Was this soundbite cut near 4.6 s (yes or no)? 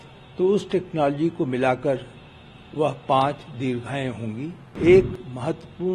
yes